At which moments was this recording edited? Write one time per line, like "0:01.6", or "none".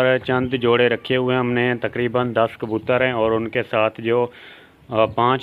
none